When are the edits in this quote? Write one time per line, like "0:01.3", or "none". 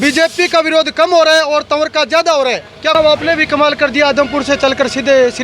0:02.9

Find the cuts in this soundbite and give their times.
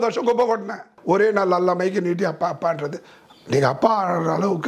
0:00.9

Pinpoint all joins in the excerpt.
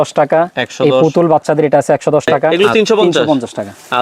0:02.5

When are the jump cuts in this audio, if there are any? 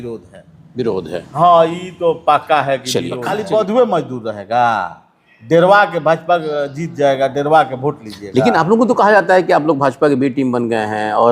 0:03.2

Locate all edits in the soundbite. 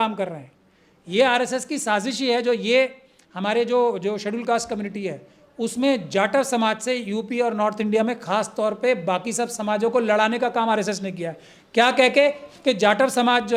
none

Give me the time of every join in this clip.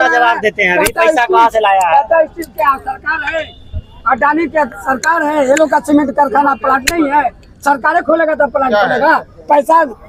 none

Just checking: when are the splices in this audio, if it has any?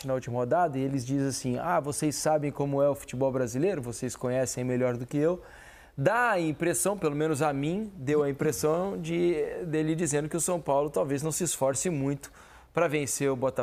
none

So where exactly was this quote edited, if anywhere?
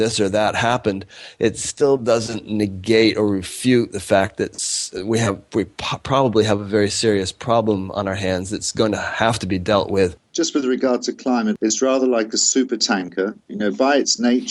0:10.2
0:11.6
0:13.4

